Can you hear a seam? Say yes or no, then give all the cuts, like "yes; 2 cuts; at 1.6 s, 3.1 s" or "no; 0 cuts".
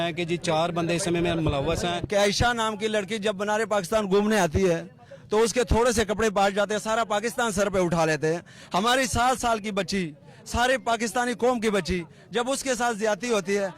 yes; 1 cut; at 2.0 s